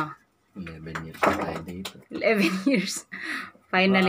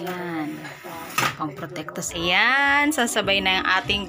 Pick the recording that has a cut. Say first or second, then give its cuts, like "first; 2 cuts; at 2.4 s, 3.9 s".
second; 1 cut; at 2.1 s